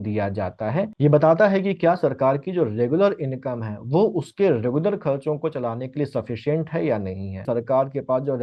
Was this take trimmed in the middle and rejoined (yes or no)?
yes